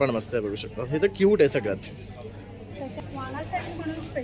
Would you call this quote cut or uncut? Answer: cut